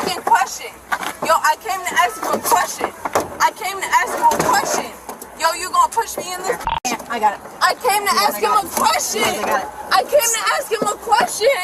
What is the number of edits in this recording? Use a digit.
0